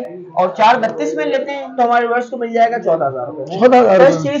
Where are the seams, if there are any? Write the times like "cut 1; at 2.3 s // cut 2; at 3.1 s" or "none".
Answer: none